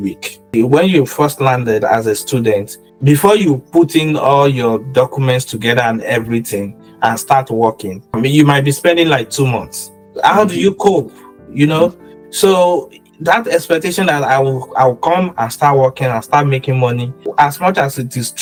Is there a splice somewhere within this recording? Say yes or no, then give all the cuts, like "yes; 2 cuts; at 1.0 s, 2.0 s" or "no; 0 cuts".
no; 0 cuts